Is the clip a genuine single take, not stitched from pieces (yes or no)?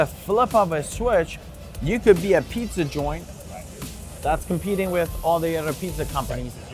yes